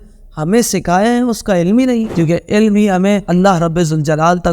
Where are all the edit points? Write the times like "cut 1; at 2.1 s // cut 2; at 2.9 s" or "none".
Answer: cut 1; at 2.1 s